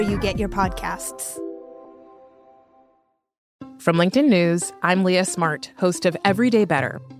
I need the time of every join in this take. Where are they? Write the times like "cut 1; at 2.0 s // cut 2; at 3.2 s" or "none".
cut 1; at 3.4 s